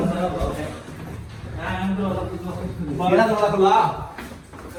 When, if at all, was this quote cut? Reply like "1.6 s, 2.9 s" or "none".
none